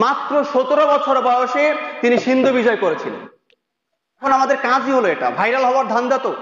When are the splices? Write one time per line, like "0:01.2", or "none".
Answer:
0:04.2